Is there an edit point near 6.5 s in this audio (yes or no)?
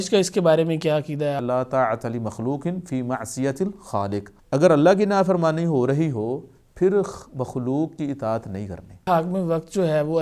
no